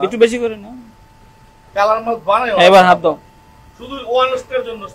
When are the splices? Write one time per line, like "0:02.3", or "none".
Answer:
none